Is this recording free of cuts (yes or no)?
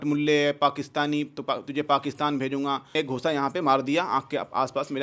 no